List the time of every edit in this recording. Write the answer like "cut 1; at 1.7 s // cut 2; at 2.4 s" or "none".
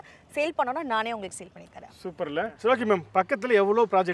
cut 1; at 2.6 s